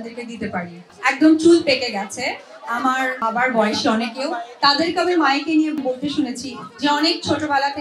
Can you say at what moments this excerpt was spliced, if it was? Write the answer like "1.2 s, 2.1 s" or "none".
0.9 s, 3.2 s, 5.8 s